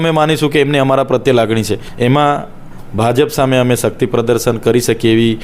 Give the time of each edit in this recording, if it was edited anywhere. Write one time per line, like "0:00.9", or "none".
0:01.8